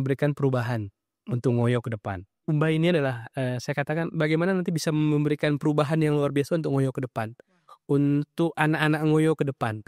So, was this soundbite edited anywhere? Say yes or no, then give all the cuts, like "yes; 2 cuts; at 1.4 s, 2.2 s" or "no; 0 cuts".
yes; 1 cut; at 2.4 s